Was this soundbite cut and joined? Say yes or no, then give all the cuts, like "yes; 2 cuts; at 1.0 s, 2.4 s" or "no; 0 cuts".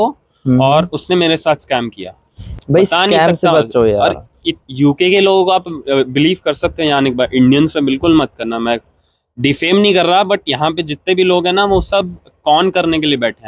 no; 0 cuts